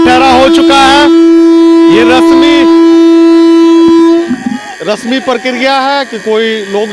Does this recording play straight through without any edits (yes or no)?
yes